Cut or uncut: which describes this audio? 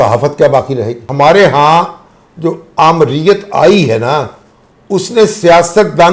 cut